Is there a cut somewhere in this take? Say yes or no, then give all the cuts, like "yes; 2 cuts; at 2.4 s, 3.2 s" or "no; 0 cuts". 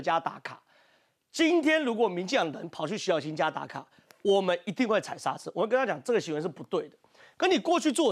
no; 0 cuts